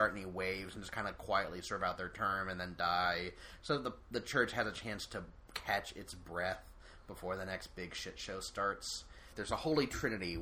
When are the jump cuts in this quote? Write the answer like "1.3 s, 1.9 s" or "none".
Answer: 9.3 s